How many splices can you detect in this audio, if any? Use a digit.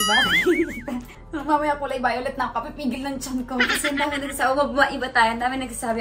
0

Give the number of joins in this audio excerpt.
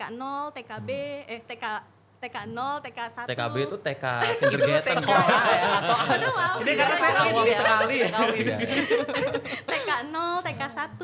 0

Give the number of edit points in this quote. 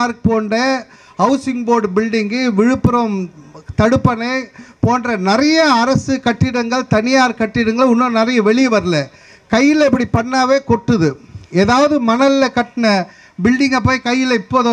0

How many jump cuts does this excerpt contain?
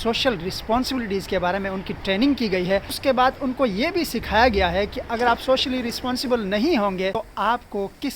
2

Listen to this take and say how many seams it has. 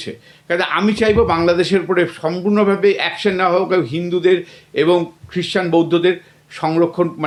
0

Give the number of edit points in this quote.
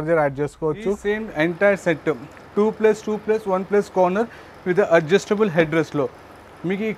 1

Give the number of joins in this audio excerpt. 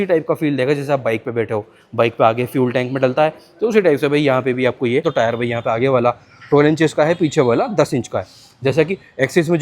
1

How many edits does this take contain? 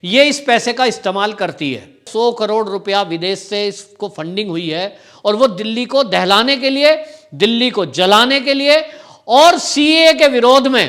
1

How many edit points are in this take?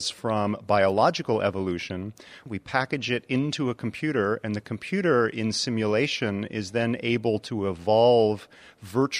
1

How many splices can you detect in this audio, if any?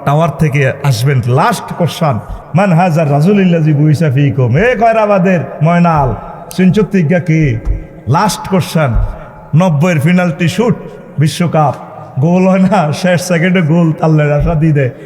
1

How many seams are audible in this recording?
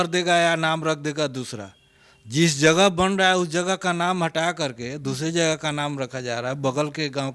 0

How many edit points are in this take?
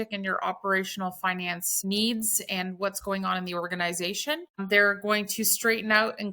2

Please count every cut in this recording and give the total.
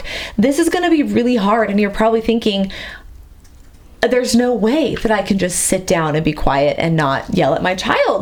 0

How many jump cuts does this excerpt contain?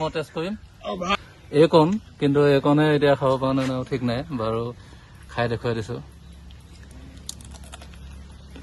1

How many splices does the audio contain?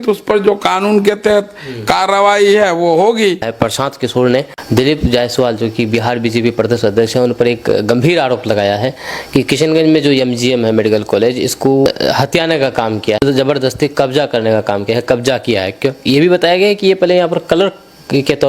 4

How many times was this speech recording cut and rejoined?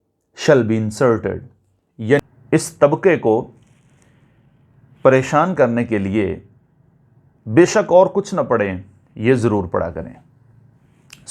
1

